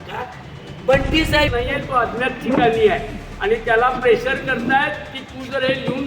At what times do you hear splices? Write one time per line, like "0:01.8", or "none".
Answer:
0:01.5